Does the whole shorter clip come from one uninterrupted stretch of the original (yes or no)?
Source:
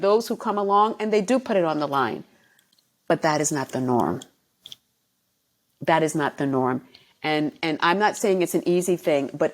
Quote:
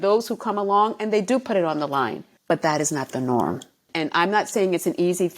no